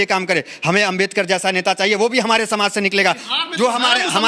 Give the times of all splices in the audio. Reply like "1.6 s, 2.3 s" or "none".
none